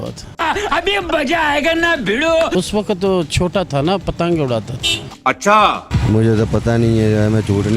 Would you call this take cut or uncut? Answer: cut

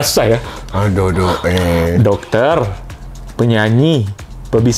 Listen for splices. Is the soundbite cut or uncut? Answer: uncut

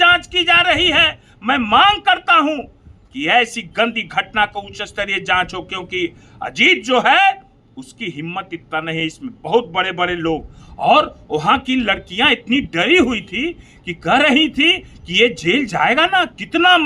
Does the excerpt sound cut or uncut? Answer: uncut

